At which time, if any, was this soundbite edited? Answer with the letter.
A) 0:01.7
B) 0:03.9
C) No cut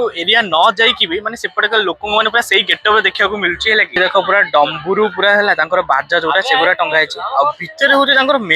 B